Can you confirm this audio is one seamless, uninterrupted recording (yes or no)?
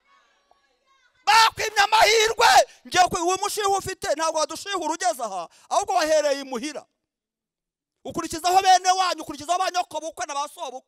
no